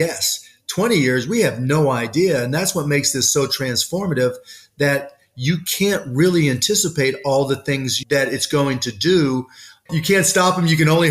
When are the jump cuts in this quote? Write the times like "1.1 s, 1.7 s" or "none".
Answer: 7.9 s, 9.7 s